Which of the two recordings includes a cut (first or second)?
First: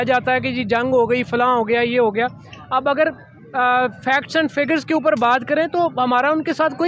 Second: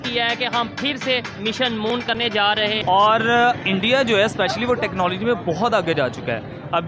second